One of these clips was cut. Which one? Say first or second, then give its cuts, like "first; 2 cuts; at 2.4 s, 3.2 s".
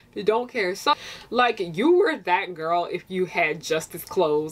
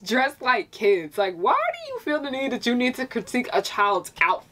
first; 1 cut; at 1.0 s